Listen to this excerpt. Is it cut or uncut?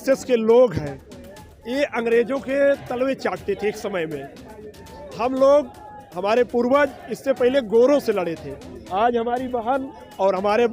uncut